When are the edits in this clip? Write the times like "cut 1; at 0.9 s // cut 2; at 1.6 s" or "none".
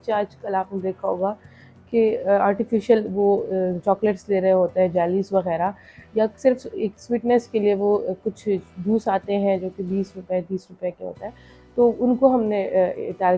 none